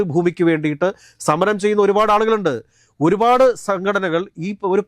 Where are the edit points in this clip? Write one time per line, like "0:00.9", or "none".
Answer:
none